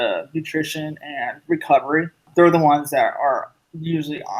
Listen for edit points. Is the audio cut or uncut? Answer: cut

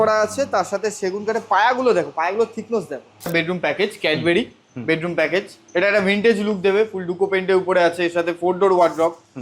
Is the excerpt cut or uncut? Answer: cut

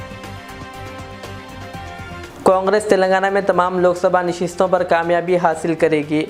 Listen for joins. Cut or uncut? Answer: uncut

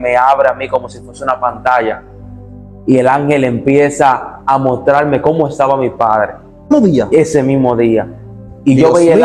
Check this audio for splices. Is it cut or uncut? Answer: cut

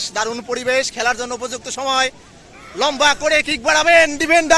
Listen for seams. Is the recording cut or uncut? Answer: uncut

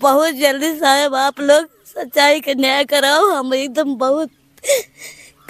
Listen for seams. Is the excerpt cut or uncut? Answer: uncut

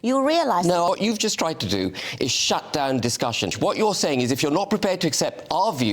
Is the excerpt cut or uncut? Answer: cut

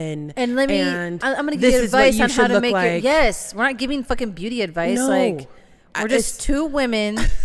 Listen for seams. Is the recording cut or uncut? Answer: uncut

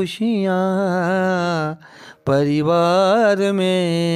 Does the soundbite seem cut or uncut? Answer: uncut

